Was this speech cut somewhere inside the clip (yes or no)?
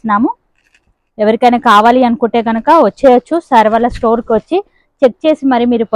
no